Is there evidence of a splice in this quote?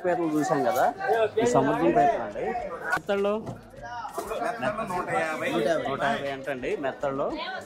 yes; 1 cut; at 3.0 s

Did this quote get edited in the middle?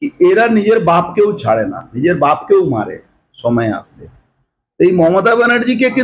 no; 0 cuts

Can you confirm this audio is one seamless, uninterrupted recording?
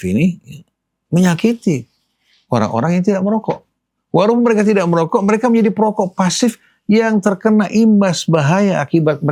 yes; 0 cuts

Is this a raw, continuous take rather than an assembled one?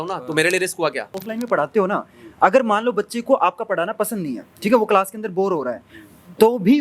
no; 1 cut; at 1.2 s

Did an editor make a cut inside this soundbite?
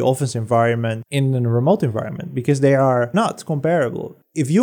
yes; 1 cut; at 1.0 s

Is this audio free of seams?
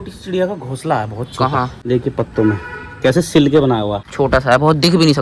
no; 2 cuts; at 1.8 s, 4.0 s

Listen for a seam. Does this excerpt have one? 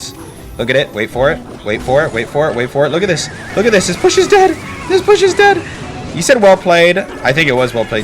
yes; 1 cut; at 7.1 s

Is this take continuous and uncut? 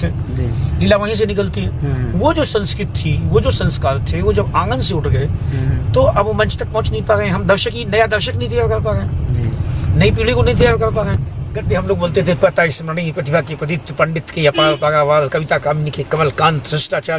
no; 1 cut; at 11.7 s

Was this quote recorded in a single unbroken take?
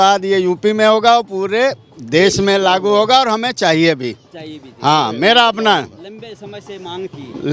yes; 0 cuts

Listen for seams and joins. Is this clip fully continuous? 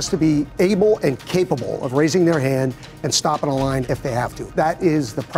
no; 1 cut; at 4.4 s

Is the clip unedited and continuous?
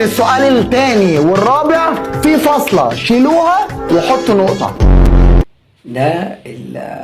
yes; 0 cuts

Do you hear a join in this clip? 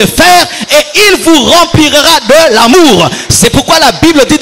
no; 0 cuts

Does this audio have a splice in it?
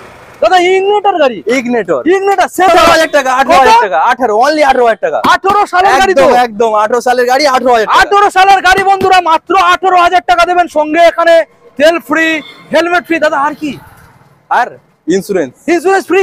yes; 1 cut; at 2.7 s

